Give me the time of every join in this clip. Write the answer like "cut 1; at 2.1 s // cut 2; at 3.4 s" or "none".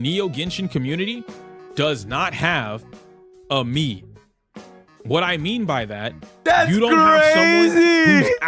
none

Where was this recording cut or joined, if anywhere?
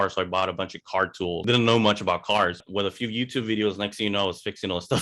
cut 1; at 1.4 s // cut 2; at 2.6 s

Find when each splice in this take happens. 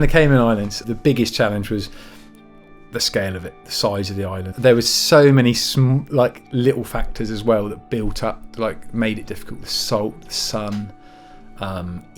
cut 1; at 0.8 s // cut 2; at 4.5 s

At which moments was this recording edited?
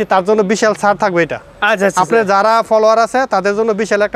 none

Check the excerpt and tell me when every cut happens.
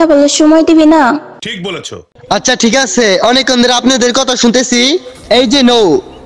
cut 1; at 1.5 s

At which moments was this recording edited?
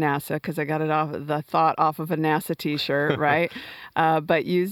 none

